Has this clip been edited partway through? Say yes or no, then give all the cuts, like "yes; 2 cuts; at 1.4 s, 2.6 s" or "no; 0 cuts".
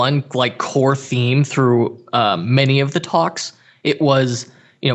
no; 0 cuts